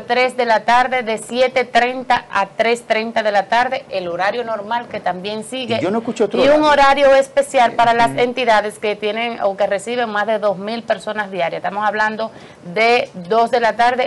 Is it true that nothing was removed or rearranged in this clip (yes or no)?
yes